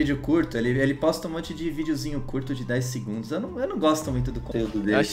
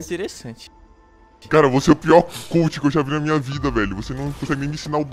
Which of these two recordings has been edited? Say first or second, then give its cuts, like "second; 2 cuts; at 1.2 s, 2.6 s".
second; 1 cut; at 1.1 s